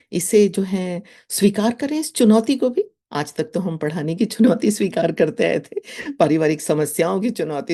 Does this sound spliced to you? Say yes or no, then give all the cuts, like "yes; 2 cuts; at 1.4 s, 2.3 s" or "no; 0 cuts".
no; 0 cuts